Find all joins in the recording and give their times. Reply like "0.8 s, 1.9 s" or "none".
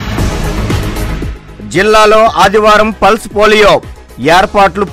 none